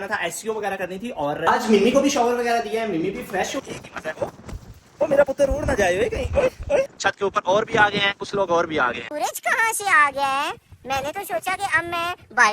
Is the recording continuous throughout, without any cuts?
no; 4 cuts; at 1.4 s, 3.5 s, 6.9 s, 9.1 s

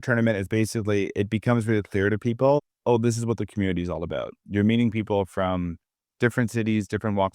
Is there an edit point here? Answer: no; 0 cuts

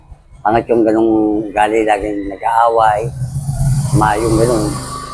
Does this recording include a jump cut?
no; 0 cuts

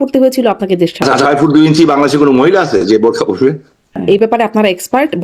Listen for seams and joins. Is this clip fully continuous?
no; 2 cuts; at 1.1 s, 4.0 s

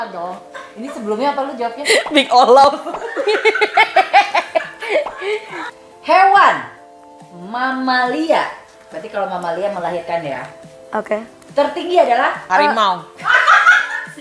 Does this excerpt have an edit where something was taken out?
yes; 2 cuts; at 5.6 s, 12.5 s

